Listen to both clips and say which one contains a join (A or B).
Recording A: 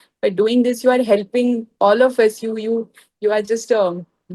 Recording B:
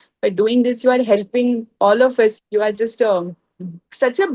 B